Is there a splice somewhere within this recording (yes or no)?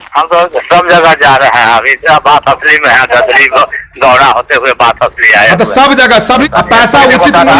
yes